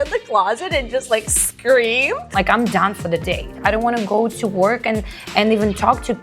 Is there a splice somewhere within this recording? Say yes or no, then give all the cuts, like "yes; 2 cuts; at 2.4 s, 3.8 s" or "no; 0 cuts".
yes; 2 cuts; at 2.3 s, 3.6 s